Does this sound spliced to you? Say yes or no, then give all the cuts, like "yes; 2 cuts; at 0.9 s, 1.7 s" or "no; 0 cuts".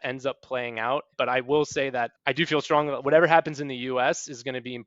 yes; 2 cuts; at 1.1 s, 2.1 s